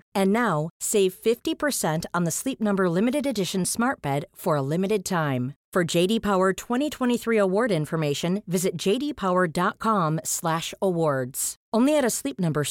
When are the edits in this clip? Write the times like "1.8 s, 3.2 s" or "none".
none